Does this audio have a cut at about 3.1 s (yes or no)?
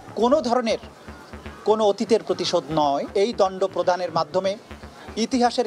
yes